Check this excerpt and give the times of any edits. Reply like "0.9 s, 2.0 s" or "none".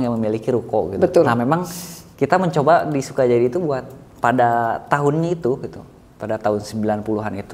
none